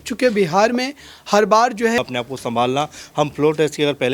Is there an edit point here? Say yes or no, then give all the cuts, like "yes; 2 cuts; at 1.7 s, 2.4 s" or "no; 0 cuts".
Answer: yes; 1 cut; at 2.0 s